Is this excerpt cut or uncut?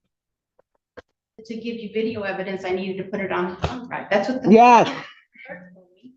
cut